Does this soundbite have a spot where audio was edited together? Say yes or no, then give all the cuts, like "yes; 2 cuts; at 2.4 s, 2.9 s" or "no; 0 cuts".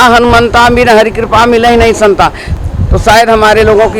yes; 1 cut; at 2.5 s